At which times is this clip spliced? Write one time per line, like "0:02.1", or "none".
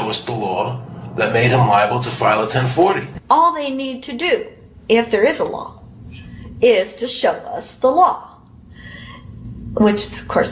none

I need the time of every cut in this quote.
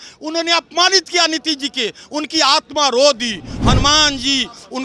none

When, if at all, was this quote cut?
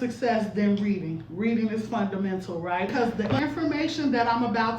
0:02.9

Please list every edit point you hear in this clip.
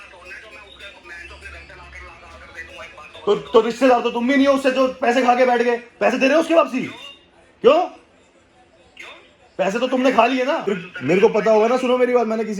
0:10.8

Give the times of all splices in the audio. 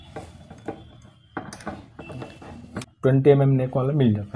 0:02.7

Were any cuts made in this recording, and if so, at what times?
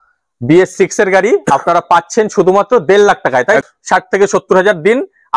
0:03.6

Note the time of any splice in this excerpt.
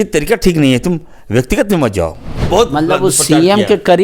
0:02.3

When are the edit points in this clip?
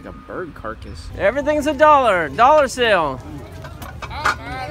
0:01.0

